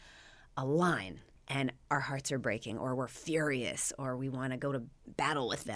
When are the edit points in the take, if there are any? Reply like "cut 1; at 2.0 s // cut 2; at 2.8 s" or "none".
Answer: none